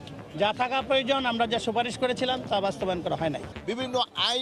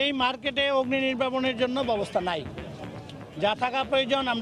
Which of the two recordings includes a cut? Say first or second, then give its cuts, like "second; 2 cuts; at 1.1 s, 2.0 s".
first; 1 cut; at 3.5 s